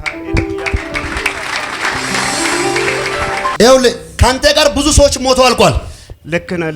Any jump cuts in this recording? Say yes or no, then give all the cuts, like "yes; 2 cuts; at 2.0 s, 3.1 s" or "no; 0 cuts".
yes; 1 cut; at 3.5 s